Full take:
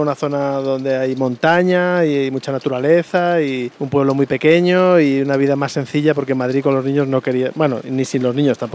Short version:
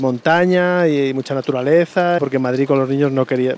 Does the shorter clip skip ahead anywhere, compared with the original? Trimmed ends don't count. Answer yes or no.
yes